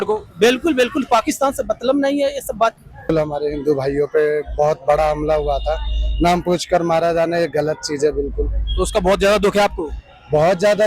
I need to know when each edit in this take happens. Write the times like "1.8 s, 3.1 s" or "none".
3.1 s